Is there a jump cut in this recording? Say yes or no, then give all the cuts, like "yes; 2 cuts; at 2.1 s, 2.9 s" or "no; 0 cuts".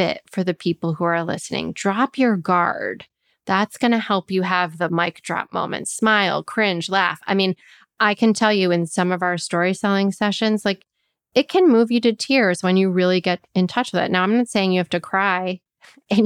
no; 0 cuts